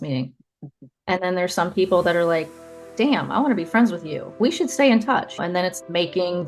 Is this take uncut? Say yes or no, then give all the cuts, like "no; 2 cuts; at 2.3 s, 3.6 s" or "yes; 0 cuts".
no; 2 cuts; at 4.3 s, 5.4 s